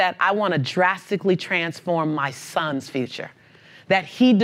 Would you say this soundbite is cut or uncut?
uncut